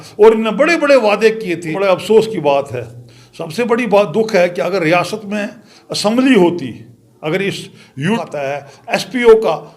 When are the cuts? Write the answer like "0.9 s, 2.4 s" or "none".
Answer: 1.7 s, 8.2 s